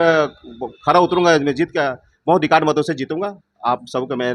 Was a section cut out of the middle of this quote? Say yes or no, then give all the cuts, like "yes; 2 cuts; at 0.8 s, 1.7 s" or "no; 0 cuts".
no; 0 cuts